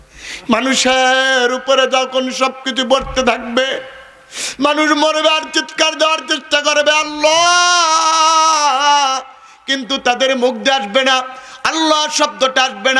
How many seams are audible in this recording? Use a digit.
0